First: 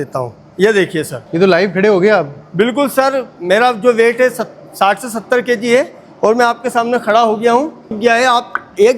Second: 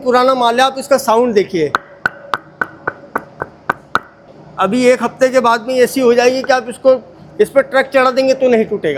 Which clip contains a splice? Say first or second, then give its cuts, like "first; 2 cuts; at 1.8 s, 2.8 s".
first; 2 cuts; at 1.2 s, 8.0 s